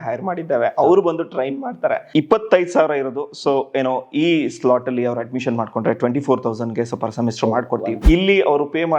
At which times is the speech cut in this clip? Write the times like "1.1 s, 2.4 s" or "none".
2.0 s, 7.9 s